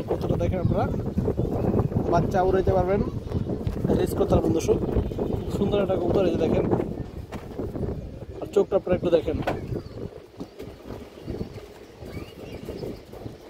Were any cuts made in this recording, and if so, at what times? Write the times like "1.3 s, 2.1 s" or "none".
none